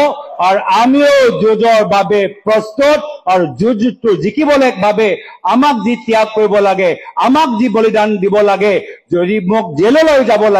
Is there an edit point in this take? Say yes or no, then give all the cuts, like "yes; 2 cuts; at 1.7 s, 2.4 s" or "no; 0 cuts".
no; 0 cuts